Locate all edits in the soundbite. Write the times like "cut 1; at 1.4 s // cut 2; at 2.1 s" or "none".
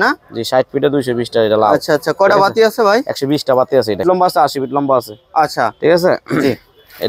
cut 1; at 4.0 s